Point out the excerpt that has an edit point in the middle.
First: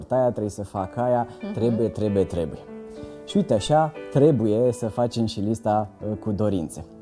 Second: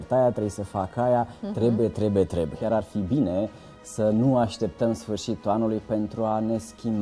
second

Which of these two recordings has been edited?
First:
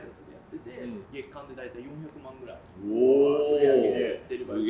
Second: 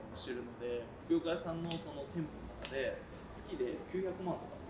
second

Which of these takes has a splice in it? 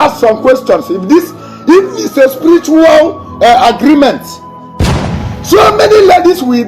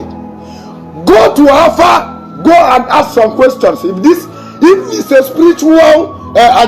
first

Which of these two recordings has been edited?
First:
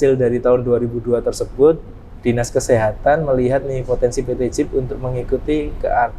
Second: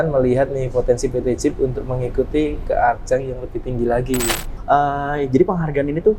second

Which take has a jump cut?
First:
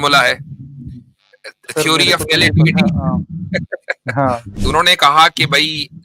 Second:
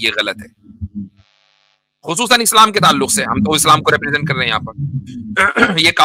first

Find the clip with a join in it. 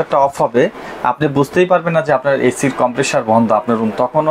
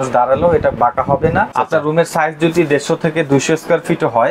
second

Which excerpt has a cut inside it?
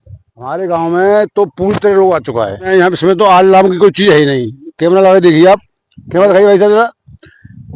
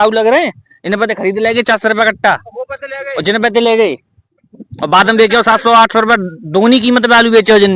first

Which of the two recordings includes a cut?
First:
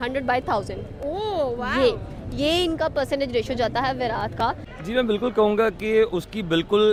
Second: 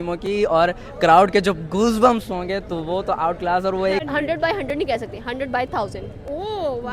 second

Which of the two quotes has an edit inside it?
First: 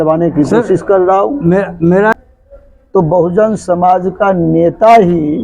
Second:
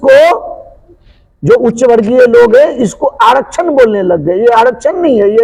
first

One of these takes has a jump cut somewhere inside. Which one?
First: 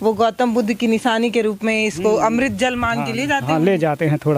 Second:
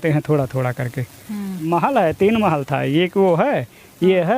second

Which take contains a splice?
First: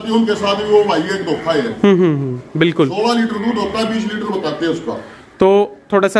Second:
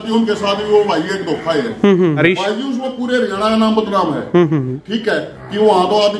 second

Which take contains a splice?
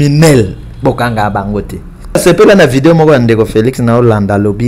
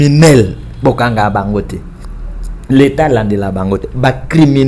first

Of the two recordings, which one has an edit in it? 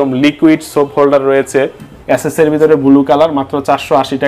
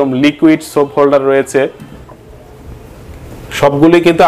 first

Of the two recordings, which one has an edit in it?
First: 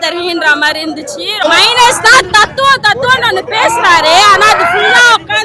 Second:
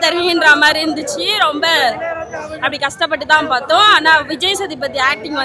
first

